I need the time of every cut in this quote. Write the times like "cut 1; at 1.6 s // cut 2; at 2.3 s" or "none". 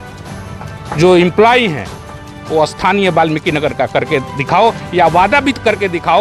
none